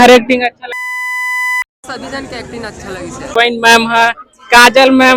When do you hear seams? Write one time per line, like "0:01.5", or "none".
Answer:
0:03.3